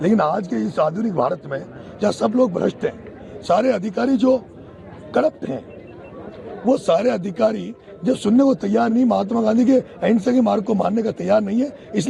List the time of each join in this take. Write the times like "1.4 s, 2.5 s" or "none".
none